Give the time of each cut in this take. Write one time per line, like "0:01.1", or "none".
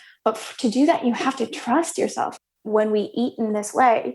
0:02.3